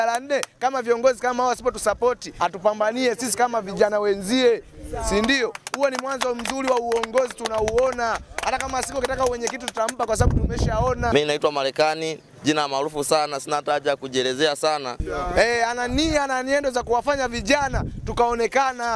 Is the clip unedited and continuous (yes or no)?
no